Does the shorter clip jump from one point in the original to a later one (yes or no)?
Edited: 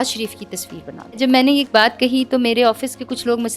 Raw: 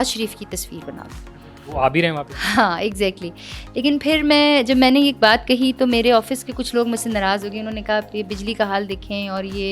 yes